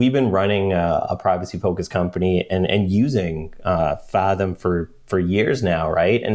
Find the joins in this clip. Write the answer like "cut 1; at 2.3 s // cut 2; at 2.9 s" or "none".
none